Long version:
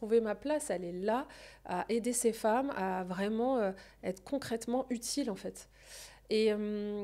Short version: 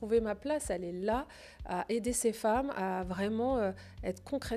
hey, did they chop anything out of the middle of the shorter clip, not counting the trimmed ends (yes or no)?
no